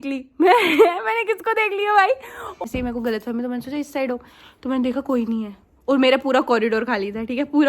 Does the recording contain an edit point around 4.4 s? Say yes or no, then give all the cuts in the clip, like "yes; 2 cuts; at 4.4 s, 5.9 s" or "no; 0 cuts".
no; 1 cut; at 2.6 s